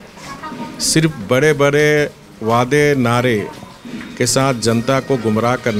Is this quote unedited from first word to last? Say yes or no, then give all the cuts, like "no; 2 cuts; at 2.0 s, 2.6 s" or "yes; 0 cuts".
yes; 0 cuts